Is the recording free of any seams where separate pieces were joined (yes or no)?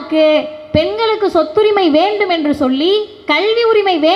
yes